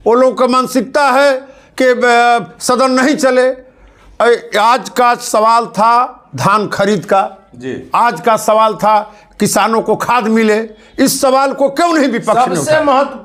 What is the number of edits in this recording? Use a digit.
0